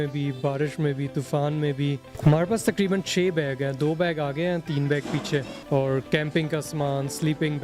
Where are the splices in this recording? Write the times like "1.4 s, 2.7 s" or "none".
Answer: 2.1 s, 5.6 s